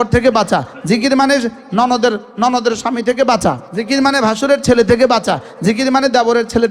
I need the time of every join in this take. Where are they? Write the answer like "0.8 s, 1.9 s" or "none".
3.7 s

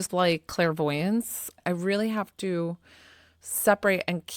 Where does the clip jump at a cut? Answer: 1.5 s

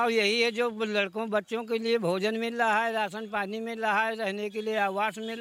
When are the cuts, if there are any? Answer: none

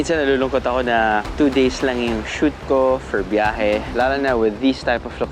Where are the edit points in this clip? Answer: 1.3 s

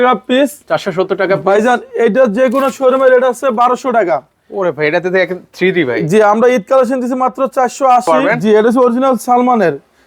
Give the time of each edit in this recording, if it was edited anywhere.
8.3 s

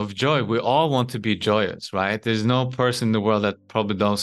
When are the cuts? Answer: none

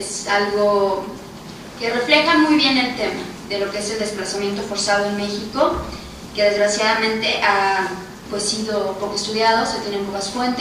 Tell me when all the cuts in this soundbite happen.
2.9 s

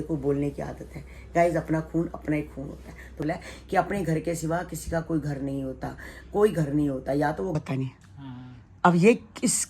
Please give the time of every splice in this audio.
3.2 s, 7.6 s

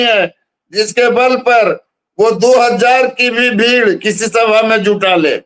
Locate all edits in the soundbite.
none

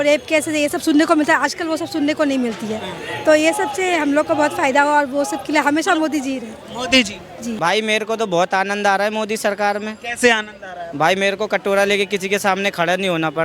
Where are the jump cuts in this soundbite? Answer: 7.5 s

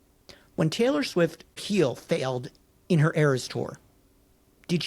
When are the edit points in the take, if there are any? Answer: 1.6 s

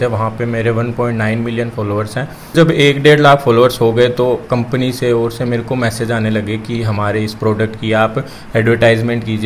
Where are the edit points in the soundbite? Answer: 2.5 s

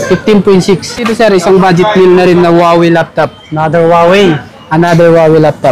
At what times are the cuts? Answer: 0.9 s

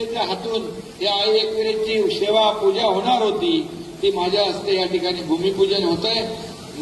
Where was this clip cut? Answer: none

